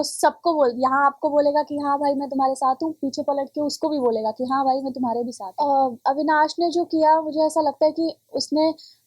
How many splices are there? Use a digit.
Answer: 1